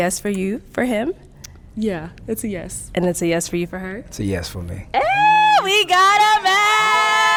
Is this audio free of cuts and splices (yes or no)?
yes